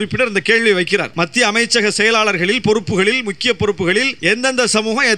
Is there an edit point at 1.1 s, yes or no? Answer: yes